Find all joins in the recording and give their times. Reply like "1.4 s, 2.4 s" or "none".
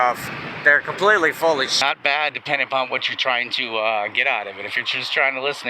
1.8 s